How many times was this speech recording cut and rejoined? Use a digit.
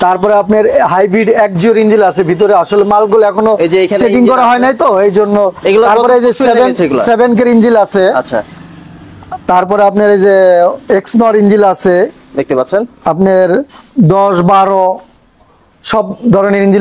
0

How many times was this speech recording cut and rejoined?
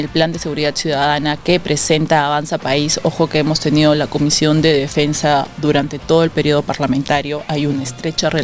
0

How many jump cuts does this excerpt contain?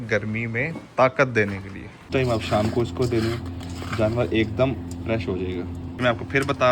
2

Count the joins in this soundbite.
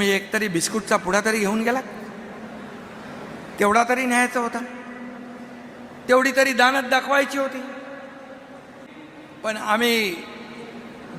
1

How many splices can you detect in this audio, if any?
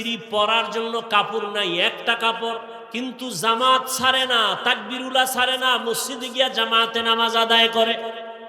1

